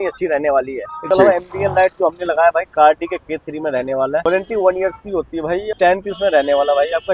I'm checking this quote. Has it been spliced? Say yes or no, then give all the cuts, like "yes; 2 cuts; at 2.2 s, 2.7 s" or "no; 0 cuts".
yes; 3 cuts; at 0.9 s, 4.2 s, 5.7 s